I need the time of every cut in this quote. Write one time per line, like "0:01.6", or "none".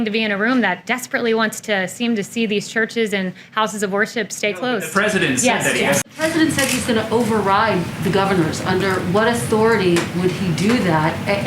0:06.0